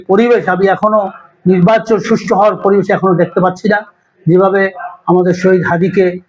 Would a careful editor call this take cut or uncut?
uncut